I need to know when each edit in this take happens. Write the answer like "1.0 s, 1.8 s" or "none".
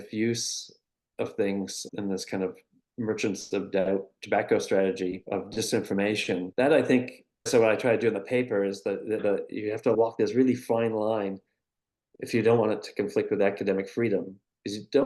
5.2 s, 6.5 s